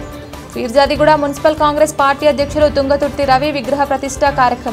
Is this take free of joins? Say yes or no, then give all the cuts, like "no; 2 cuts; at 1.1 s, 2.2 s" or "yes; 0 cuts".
yes; 0 cuts